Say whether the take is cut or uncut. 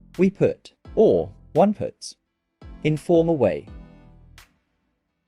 uncut